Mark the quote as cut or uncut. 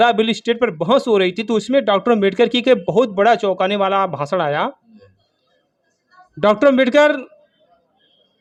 uncut